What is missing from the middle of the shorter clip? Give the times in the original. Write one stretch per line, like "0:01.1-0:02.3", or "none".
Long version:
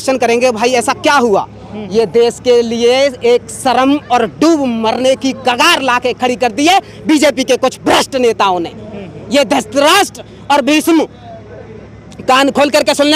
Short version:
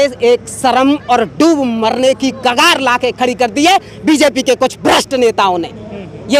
none